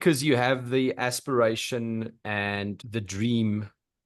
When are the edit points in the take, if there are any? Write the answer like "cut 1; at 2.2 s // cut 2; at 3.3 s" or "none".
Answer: cut 1; at 2.8 s